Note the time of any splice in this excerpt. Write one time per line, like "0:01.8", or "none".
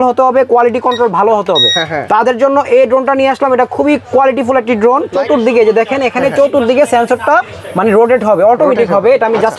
0:05.1

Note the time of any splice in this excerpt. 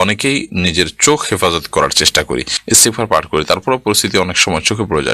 0:02.5

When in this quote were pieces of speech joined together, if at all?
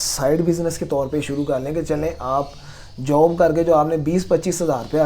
none

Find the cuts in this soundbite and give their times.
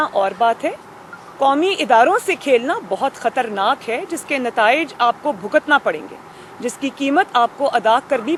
none

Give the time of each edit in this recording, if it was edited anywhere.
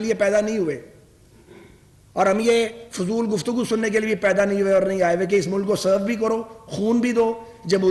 none

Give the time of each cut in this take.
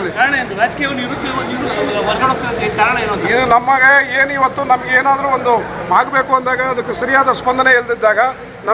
none

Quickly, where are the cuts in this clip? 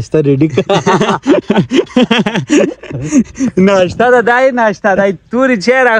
none

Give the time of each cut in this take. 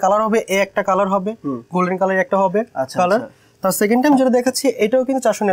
none

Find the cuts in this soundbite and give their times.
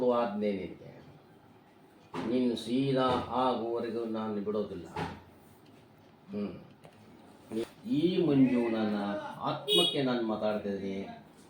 0:07.6

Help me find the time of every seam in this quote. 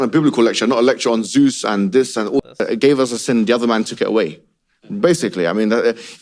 0:02.4

